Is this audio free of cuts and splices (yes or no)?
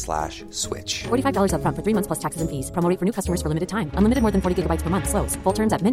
yes